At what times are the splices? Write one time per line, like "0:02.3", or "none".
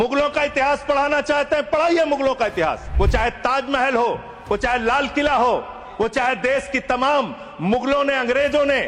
0:02.9